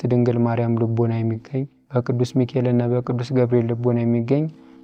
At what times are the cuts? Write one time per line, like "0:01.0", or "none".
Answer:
0:01.8